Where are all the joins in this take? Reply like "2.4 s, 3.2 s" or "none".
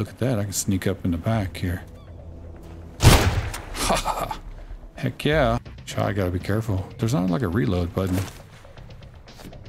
5.8 s